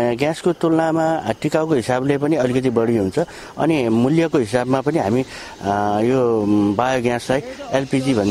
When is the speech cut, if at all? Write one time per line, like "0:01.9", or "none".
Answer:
none